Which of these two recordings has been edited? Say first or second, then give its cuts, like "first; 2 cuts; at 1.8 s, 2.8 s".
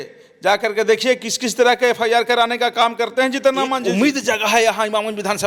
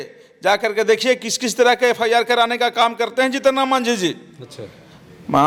first; 1 cut; at 3.8 s